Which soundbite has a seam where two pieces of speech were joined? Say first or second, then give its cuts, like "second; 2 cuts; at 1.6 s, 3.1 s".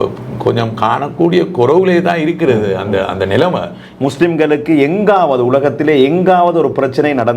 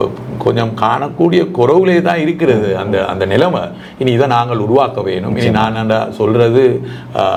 first; 1 cut; at 3.8 s